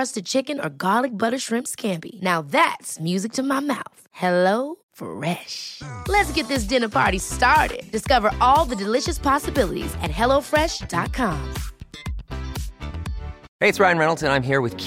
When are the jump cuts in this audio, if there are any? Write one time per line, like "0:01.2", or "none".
0:13.4